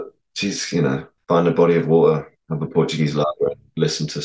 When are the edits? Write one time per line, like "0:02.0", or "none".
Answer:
0:01.1
0:02.4